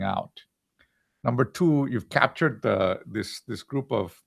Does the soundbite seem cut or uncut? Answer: cut